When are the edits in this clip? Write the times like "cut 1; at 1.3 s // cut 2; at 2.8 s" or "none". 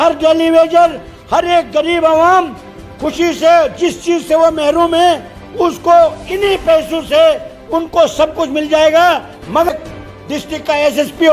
cut 1; at 9.7 s